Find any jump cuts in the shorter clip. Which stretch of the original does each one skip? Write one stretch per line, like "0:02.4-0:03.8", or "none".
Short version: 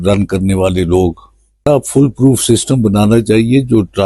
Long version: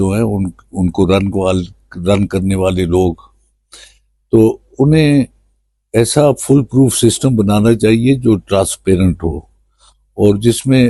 0:03.7-0:06.2